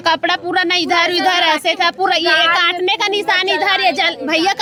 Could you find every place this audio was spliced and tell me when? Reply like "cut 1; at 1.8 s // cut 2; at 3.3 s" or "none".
none

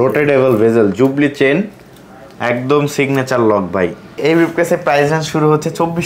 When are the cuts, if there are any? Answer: cut 1; at 4.2 s

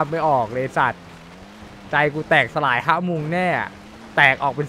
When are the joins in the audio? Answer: none

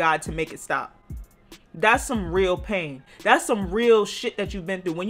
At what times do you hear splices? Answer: none

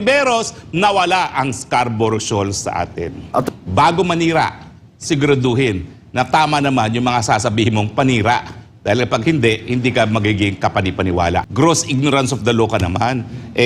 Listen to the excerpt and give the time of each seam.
cut 1; at 3.4 s // cut 2; at 11.5 s

